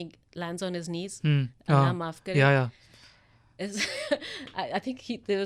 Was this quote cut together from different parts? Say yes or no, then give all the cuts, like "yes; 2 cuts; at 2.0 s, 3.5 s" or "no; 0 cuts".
no; 0 cuts